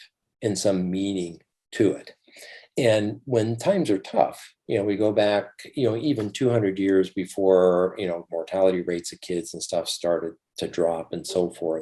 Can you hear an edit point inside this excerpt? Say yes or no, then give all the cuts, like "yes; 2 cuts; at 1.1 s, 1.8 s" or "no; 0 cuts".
no; 0 cuts